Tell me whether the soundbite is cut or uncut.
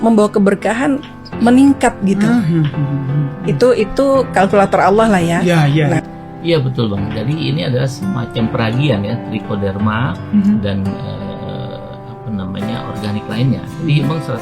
cut